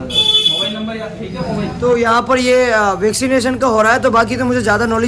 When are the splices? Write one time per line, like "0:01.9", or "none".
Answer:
0:01.7